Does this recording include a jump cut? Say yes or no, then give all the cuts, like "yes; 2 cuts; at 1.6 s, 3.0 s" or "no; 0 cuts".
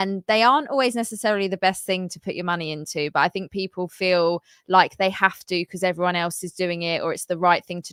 no; 0 cuts